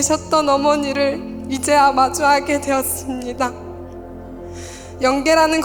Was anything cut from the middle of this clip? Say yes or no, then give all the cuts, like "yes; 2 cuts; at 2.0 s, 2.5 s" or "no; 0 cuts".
no; 0 cuts